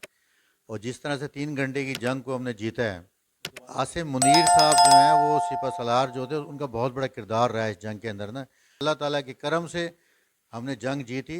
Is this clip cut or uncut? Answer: cut